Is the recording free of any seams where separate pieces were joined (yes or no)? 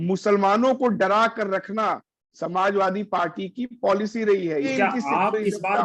no